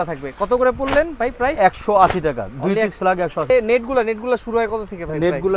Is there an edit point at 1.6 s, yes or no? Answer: no